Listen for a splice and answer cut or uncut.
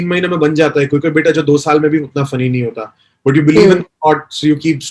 uncut